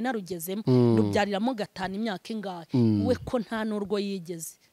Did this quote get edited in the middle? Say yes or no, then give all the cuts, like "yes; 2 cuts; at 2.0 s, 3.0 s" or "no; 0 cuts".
no; 0 cuts